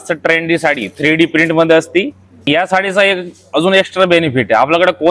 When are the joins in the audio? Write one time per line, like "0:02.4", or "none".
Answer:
0:02.5